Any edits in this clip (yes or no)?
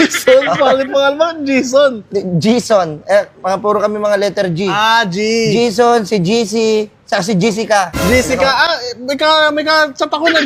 no